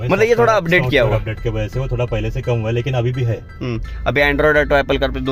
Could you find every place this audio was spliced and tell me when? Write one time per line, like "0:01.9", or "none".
none